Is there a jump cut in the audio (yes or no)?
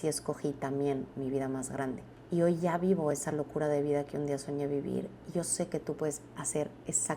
yes